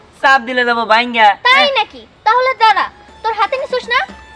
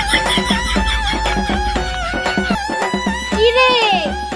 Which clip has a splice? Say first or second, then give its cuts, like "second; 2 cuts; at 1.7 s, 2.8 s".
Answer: second; 1 cut; at 2.6 s